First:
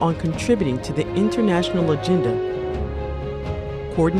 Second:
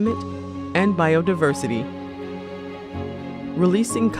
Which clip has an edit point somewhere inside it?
first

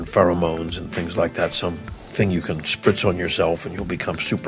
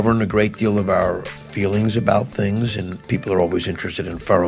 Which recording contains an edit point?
second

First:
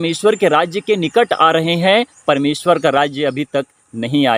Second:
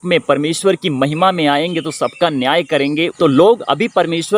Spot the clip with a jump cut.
second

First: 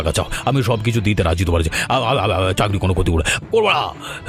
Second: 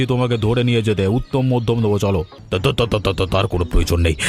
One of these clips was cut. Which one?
second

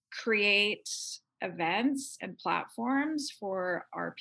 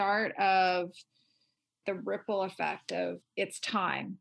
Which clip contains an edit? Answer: second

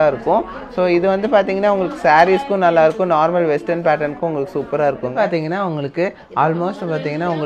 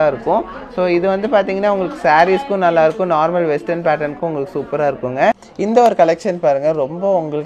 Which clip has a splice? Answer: first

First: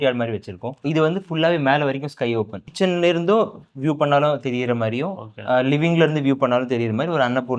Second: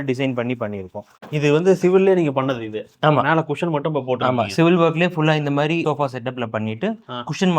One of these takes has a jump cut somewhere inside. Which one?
second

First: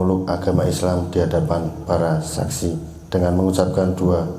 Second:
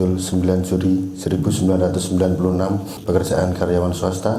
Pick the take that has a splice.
second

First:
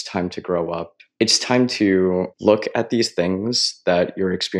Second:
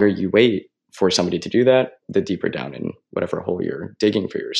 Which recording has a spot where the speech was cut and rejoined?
first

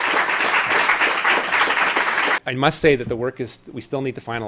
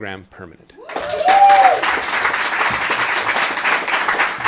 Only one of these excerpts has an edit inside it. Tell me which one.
first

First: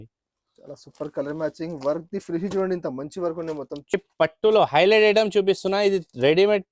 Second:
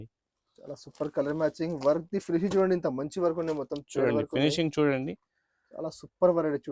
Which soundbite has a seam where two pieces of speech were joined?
first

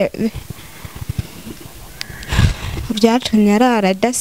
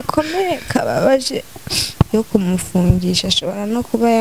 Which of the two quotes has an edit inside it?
second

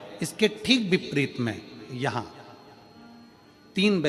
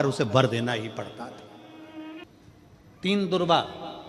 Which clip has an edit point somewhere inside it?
second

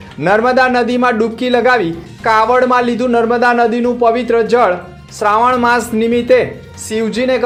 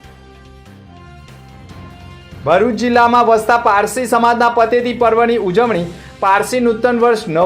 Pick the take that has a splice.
second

